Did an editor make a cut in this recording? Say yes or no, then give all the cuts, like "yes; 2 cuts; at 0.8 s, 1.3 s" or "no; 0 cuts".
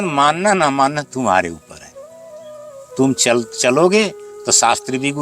yes; 2 cuts; at 1.7 s, 3.0 s